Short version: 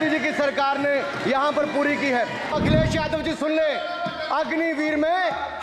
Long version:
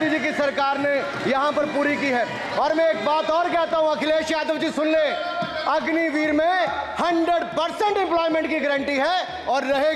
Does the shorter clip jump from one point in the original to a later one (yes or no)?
yes